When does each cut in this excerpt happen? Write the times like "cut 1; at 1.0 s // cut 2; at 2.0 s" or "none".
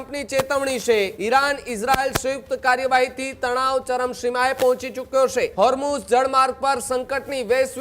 cut 1; at 1.2 s // cut 2; at 5.5 s

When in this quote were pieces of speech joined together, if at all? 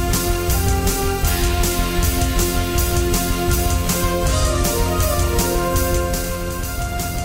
cut 1; at 6.3 s

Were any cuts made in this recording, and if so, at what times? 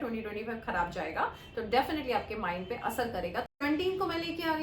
cut 1; at 3.5 s

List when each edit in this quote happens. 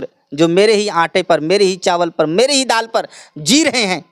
none

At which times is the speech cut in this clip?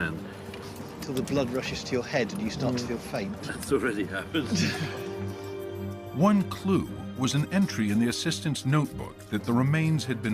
cut 1; at 5.8 s

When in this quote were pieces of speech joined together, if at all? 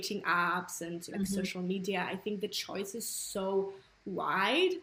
none

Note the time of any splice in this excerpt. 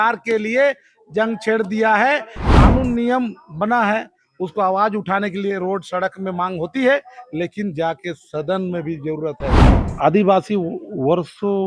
cut 1; at 2.4 s // cut 2; at 9.7 s

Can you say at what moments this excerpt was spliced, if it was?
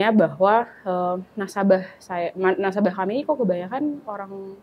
none

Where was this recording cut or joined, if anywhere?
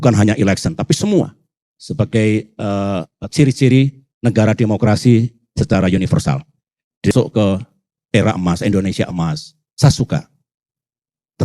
cut 1; at 7.1 s

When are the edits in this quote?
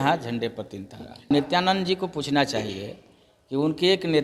cut 1; at 1.3 s

